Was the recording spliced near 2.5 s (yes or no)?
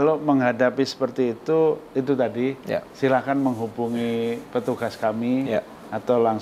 no